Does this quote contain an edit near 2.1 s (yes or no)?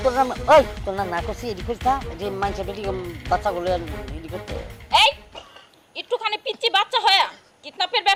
no